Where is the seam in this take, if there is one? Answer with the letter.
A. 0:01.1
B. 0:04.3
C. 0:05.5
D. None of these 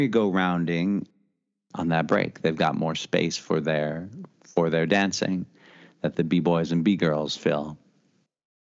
A